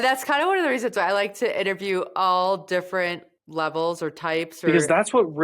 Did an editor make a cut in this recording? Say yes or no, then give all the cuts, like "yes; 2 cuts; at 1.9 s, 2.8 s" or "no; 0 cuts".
yes; 1 cut; at 4.5 s